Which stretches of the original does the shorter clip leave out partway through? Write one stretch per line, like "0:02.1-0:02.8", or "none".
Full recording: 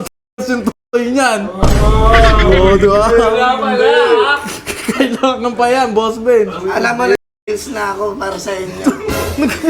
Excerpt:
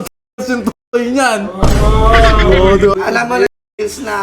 0:02.9-0:06.6